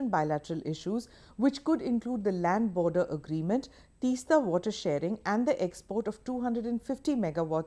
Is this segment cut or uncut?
cut